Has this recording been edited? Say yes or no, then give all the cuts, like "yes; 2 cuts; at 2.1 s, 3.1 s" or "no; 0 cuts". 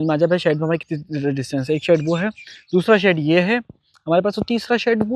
no; 0 cuts